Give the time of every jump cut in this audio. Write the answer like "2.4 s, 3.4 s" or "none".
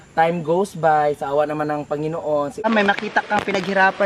2.7 s